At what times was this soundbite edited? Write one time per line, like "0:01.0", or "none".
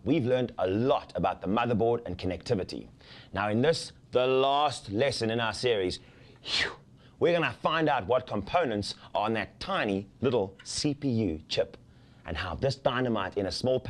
0:09.0